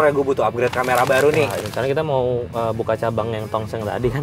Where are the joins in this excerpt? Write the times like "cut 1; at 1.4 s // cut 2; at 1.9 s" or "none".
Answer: cut 1; at 1.6 s